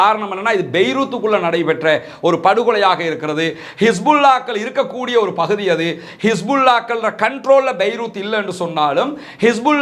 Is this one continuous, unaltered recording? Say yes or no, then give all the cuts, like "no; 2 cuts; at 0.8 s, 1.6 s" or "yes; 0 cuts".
yes; 0 cuts